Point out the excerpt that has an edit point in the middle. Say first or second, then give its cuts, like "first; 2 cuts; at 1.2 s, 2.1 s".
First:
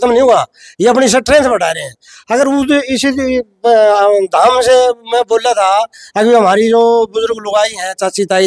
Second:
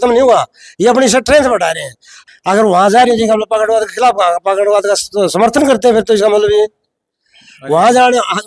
second; 1 cut; at 2.2 s